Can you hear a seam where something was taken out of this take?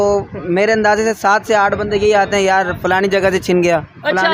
no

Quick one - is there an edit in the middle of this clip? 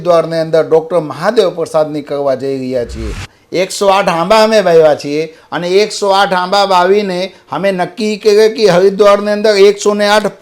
yes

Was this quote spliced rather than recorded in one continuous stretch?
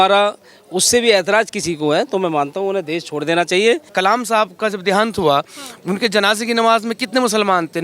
yes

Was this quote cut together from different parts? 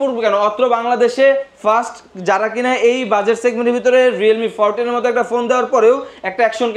no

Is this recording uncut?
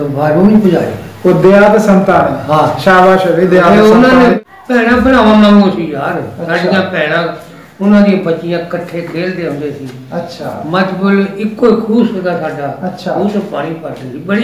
no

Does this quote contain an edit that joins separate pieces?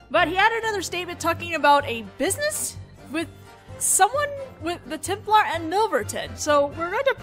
no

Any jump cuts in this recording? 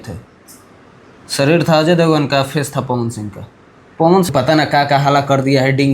yes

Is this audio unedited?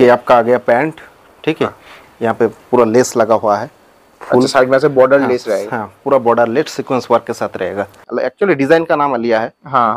no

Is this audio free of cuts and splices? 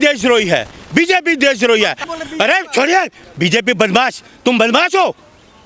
no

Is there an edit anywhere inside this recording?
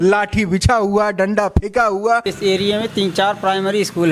yes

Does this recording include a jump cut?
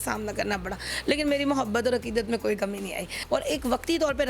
yes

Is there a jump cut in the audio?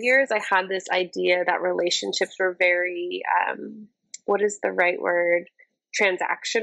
no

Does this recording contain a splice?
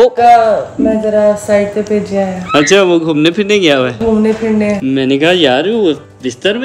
no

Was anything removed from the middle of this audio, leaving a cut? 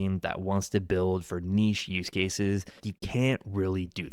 yes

